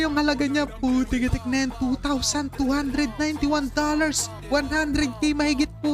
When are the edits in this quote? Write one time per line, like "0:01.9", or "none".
none